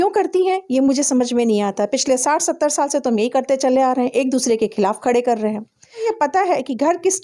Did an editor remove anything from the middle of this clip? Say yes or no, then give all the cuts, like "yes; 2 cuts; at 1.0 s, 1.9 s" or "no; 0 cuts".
yes; 1 cut; at 6.1 s